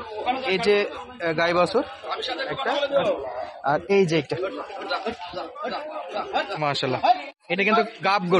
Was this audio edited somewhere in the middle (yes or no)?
no